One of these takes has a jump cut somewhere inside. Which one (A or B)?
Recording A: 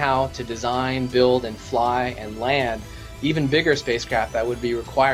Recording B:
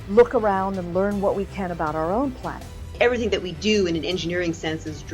B